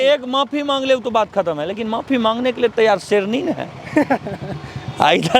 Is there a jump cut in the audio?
no; 0 cuts

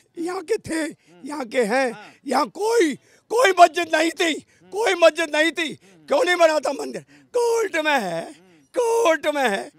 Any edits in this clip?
no; 0 cuts

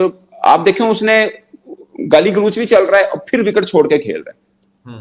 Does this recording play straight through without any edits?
yes; 0 cuts

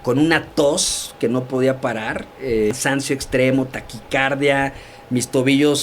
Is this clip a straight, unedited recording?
no; 1 cut; at 2.7 s

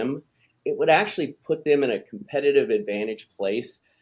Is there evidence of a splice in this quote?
no; 0 cuts

